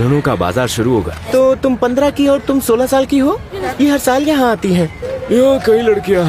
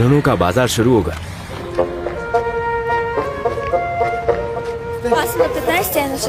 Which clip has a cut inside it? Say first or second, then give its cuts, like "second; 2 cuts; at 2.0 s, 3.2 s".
first; 3 cuts; at 1.2 s, 3.6 s, 5.1 s